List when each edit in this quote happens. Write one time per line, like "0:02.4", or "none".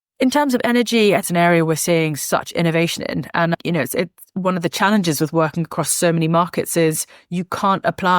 0:01.2